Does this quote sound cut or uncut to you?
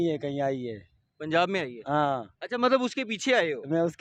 uncut